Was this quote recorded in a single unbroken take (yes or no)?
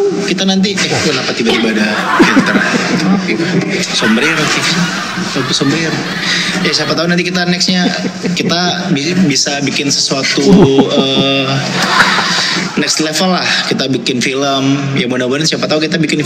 yes